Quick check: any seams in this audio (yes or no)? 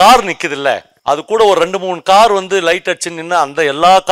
yes